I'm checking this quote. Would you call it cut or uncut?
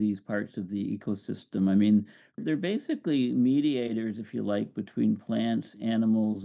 cut